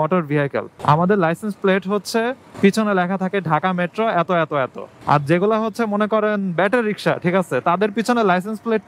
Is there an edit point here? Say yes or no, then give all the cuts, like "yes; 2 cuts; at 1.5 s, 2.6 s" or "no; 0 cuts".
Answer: no; 0 cuts